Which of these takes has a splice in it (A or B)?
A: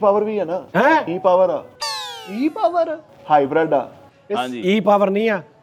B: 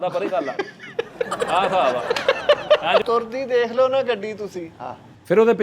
B